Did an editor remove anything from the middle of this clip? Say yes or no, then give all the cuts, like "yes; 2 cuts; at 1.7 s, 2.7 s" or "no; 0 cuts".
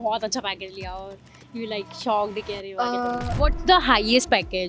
yes; 1 cut; at 3.4 s